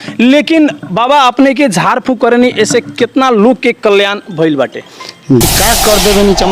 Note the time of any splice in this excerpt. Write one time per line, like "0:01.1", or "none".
0:05.4